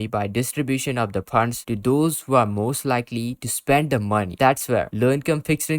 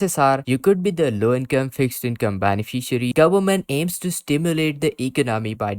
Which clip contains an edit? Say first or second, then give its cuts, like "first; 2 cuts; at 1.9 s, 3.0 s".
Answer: second; 1 cut; at 3.1 s